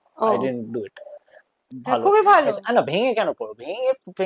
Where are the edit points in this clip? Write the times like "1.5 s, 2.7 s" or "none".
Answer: 1.7 s